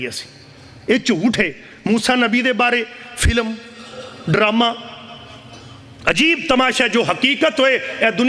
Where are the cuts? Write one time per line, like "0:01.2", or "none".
none